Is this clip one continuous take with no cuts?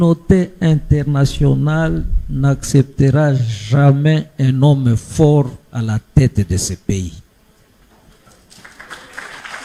yes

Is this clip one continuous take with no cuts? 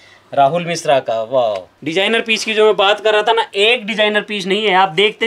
no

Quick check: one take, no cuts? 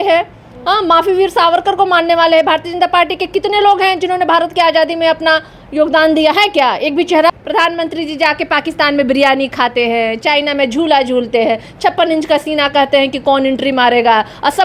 no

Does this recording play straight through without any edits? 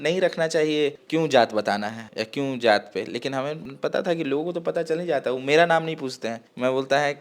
no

